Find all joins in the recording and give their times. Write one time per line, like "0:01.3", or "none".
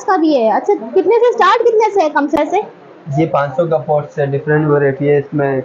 0:02.4